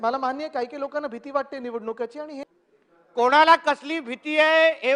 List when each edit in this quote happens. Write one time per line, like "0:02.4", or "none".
0:02.5